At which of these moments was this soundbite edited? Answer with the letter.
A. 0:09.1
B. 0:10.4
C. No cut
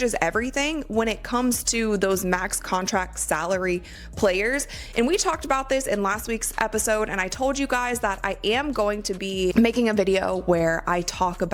B